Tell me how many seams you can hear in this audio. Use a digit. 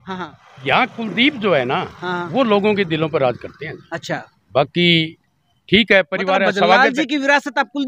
0